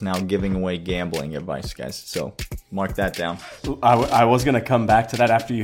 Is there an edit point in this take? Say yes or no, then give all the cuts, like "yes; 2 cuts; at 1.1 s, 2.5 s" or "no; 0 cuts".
yes; 1 cut; at 3.3 s